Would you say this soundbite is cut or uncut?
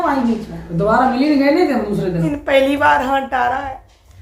cut